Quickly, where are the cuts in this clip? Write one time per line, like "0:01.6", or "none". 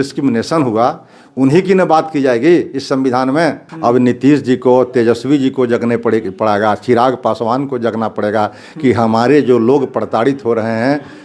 0:03.7